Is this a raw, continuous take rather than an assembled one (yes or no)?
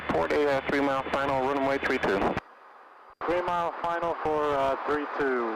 yes